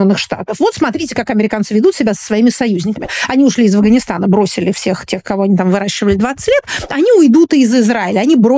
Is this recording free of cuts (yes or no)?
yes